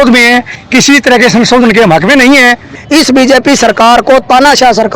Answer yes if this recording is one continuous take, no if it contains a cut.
no